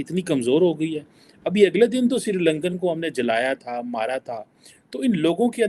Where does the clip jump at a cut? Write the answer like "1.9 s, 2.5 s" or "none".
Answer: none